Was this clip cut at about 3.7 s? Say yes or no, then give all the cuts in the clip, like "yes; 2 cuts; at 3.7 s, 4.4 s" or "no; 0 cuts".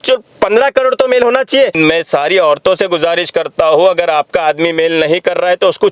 no; 1 cut; at 1.7 s